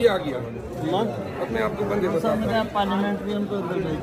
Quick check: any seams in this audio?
no; 0 cuts

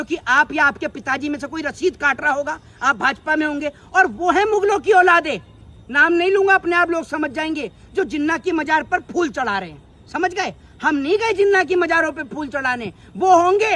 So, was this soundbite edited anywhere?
no; 0 cuts

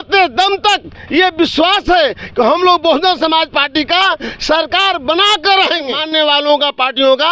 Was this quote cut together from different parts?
yes; 1 cut; at 6.0 s

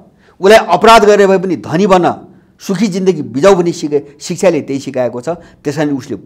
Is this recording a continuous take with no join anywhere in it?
yes; 0 cuts

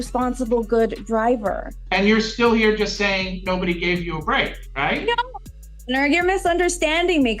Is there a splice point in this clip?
yes; 2 cuts; at 1.7 s, 4.6 s

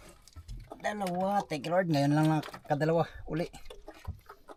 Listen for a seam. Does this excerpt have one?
no; 0 cuts

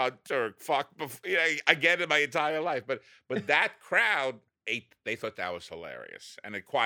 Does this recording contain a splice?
yes; 1 cut; at 4.5 s

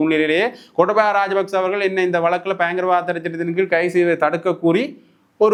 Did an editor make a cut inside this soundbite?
no; 0 cuts

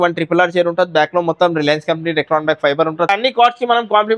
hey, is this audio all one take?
no; 1 cut; at 3.1 s

